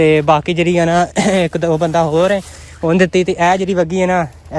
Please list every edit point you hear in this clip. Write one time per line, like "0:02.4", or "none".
none

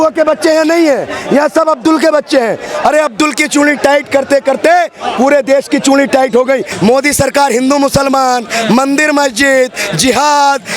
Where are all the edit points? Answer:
0:06.7

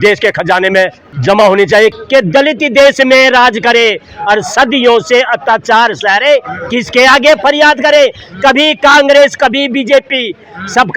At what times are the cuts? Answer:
0:01.1
0:01.9

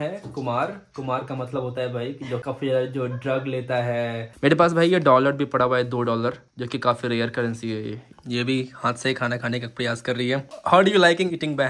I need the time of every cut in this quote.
0:02.4
0:04.2
0:08.1
0:10.5

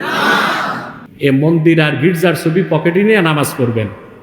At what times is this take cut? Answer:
0:01.0

